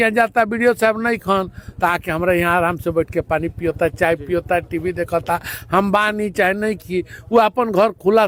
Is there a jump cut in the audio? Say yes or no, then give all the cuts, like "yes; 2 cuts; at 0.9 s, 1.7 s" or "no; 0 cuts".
no; 0 cuts